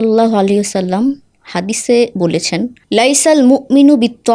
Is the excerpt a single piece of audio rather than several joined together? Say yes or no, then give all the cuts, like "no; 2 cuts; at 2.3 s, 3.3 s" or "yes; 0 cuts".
yes; 0 cuts